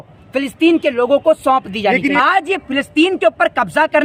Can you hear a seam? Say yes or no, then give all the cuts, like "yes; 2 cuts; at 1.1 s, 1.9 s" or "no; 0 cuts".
yes; 1 cut; at 2.2 s